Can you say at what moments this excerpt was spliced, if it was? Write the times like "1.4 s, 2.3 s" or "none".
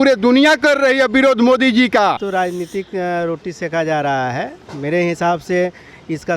2.2 s